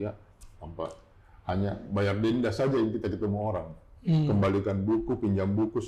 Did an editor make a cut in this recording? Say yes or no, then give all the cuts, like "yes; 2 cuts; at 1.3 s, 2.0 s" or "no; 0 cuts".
no; 0 cuts